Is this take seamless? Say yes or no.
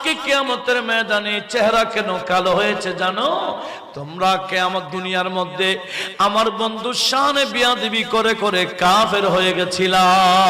yes